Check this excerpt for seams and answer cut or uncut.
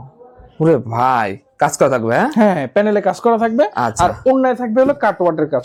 uncut